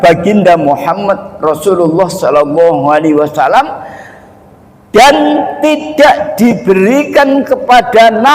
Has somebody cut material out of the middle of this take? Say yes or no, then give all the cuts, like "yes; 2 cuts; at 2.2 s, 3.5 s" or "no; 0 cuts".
no; 0 cuts